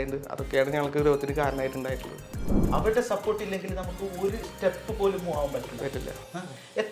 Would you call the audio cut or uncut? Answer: cut